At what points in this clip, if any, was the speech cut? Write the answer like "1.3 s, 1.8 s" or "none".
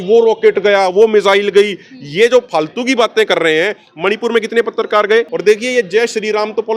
5.3 s